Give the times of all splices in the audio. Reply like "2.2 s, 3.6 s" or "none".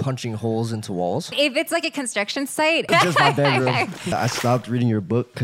1.3 s, 2.9 s, 4.1 s